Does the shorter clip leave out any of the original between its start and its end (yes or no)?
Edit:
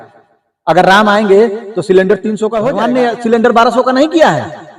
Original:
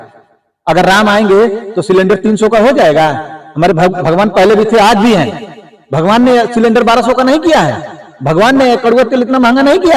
yes